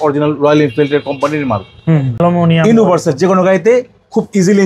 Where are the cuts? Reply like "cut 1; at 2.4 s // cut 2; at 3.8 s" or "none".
cut 1; at 2.2 s